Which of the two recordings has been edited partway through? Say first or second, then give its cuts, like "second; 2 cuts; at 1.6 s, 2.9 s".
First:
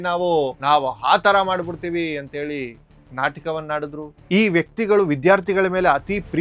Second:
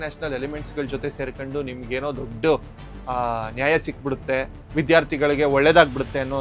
first; 1 cut; at 4.2 s